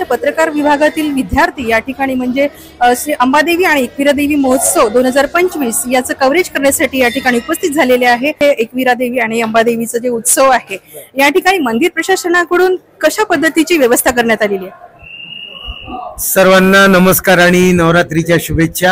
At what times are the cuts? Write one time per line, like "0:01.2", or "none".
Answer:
0:08.4